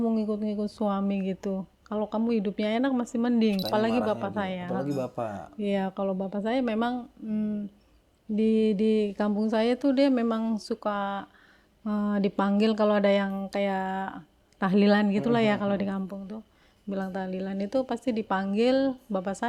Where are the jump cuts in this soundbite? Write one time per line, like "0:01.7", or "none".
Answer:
0:03.6